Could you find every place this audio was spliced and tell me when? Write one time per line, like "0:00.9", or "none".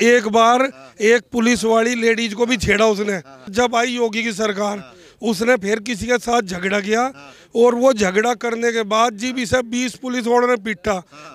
0:03.5

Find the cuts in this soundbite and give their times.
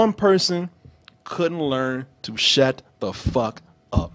none

